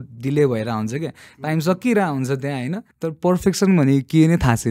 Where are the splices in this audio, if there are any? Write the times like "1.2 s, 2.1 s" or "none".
2.8 s